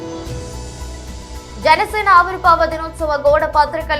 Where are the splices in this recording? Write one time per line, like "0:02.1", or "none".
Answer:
0:01.2